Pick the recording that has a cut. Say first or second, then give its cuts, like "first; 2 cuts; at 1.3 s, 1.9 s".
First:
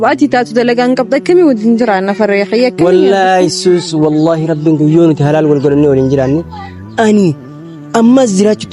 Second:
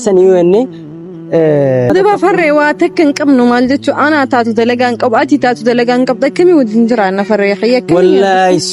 second; 1 cut; at 1.9 s